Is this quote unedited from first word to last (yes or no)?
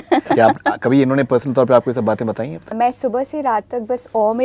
no